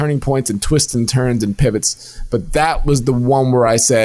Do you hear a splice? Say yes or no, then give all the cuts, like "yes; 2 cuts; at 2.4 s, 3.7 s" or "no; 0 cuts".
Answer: no; 0 cuts